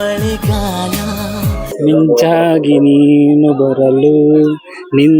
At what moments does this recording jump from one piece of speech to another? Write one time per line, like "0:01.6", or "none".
0:01.7